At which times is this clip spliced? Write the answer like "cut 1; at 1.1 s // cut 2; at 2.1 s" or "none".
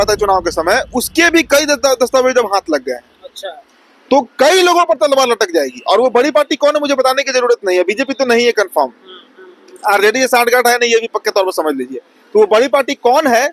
none